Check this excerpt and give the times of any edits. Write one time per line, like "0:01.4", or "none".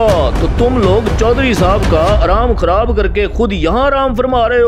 none